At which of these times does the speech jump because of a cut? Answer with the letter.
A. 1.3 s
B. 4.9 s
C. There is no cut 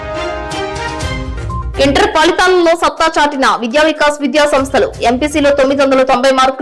A